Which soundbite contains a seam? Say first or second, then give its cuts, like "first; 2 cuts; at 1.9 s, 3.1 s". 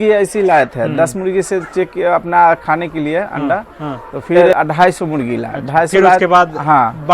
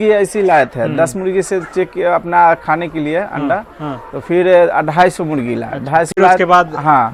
first; 1 cut; at 4.4 s